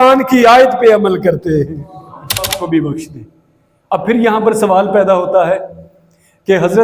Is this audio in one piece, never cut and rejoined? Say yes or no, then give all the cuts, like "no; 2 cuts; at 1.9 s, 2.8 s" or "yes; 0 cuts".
no; 1 cut; at 2.5 s